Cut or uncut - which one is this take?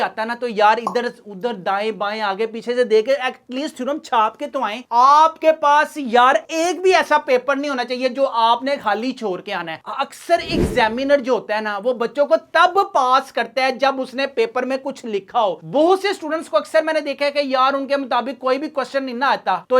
uncut